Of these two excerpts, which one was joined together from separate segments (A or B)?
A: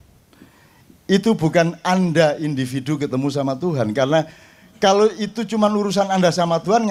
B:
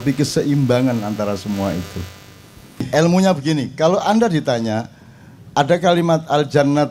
B